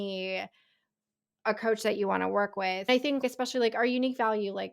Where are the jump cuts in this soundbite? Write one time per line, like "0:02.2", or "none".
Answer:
0:03.0